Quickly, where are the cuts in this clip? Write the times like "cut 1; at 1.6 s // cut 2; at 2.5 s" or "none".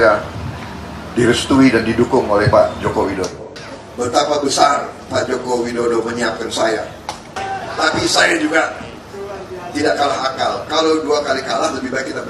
cut 1; at 3.4 s // cut 2; at 7.3 s